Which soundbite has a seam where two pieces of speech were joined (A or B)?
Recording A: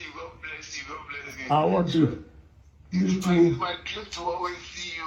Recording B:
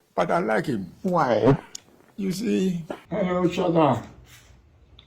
B